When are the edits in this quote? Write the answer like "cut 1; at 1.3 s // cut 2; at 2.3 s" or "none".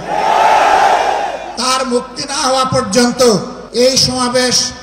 cut 1; at 1.5 s // cut 2; at 3.6 s